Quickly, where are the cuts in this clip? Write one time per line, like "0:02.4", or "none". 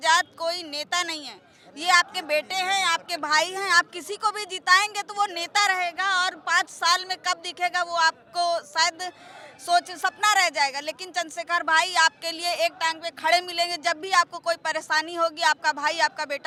none